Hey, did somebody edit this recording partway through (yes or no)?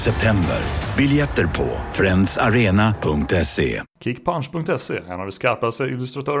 yes